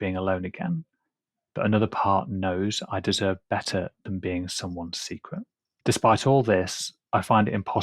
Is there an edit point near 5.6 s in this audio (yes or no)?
yes